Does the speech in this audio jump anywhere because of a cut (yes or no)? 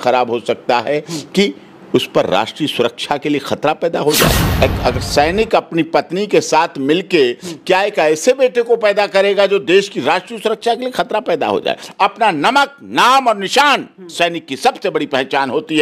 yes